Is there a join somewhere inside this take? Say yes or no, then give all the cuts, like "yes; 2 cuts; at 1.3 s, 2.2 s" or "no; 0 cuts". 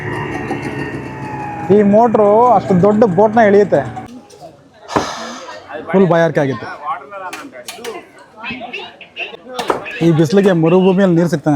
yes; 2 cuts; at 4.0 s, 9.3 s